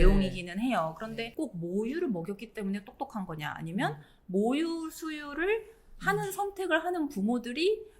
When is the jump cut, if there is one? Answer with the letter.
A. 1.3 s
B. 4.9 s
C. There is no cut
A